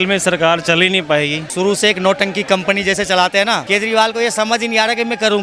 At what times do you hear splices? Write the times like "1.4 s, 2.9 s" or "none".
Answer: 1.4 s, 3.6 s